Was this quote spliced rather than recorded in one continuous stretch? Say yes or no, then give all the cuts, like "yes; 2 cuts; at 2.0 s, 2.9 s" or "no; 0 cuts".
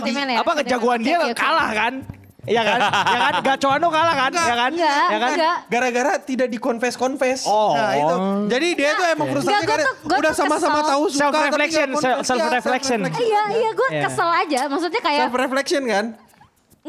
no; 0 cuts